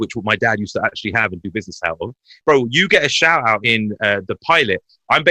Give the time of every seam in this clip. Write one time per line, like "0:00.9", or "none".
0:02.3
0:03.6